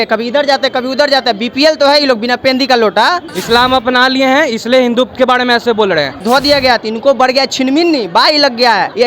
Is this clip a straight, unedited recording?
no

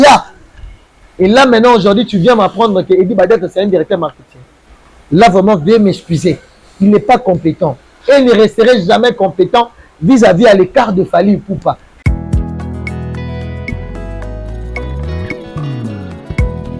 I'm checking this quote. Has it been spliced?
yes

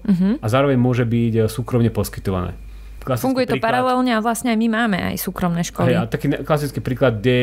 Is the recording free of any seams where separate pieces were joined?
yes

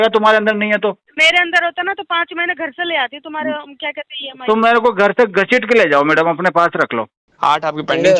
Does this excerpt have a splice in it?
yes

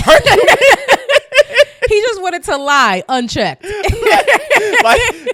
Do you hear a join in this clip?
no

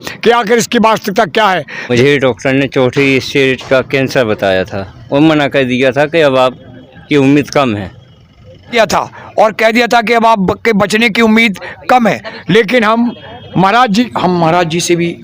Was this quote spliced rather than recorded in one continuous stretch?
yes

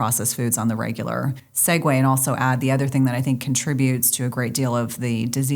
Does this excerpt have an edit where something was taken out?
yes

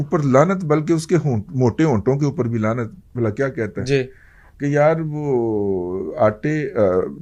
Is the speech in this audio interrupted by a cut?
no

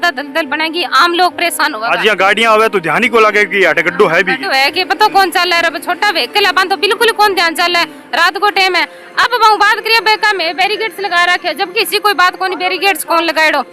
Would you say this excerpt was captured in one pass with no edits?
yes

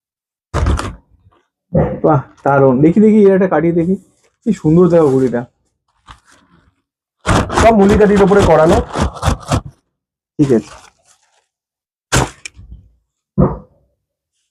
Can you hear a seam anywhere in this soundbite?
no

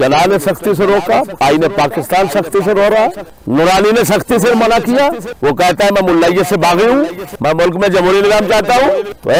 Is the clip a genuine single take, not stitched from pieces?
yes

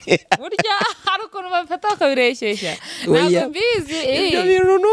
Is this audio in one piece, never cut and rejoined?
yes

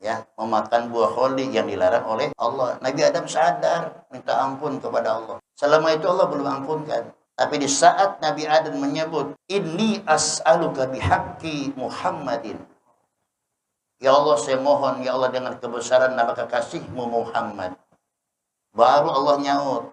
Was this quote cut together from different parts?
yes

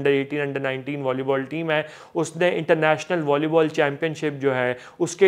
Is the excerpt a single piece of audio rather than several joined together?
yes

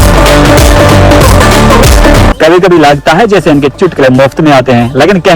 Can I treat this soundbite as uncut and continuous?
no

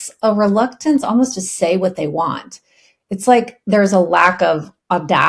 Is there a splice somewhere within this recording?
no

